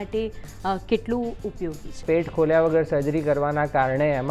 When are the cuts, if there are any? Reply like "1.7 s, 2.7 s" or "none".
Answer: 2.0 s